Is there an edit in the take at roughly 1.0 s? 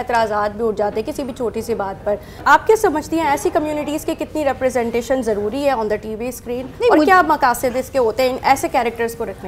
no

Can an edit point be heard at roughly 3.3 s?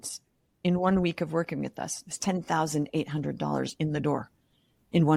no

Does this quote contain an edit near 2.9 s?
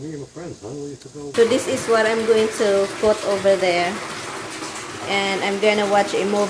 no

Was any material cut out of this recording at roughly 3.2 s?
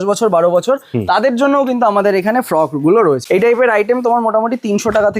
yes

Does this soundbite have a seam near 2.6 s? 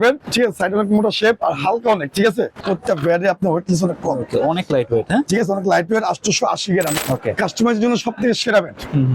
yes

